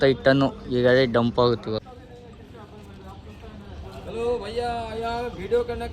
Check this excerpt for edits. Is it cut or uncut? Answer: cut